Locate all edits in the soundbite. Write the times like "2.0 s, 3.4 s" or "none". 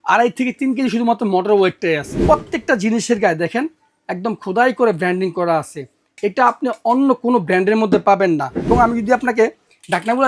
2.2 s, 8.7 s